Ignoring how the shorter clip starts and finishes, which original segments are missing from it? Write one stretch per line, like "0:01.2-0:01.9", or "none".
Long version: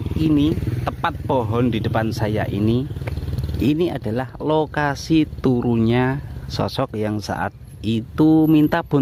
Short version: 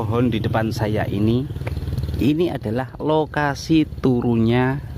none